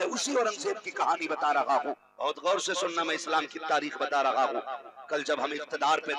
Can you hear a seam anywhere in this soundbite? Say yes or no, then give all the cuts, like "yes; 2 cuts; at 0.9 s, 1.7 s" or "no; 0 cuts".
yes; 1 cut; at 2.1 s